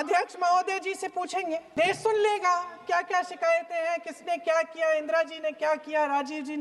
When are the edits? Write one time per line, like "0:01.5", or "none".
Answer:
0:01.7